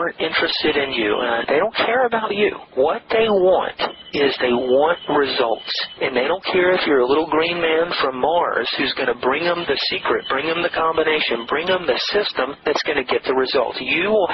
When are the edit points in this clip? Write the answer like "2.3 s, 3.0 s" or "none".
1.4 s